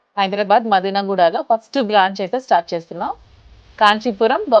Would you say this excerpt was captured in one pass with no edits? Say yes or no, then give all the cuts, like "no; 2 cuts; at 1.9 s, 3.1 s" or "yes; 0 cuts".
yes; 0 cuts